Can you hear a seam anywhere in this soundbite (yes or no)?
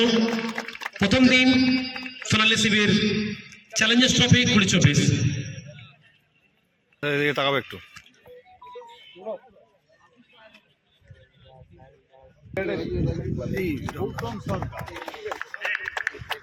no